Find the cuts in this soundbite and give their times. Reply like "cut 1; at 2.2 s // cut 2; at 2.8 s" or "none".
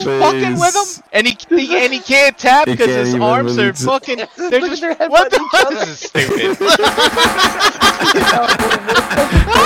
cut 1; at 1.0 s